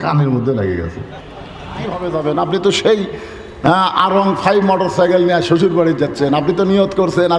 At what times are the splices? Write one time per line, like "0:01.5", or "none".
0:01.9